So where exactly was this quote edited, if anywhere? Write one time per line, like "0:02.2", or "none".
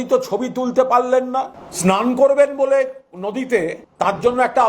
0:01.6
0:03.8